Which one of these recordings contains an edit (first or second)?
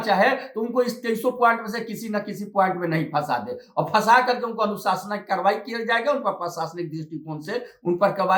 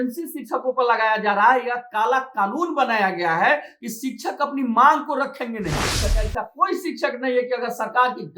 second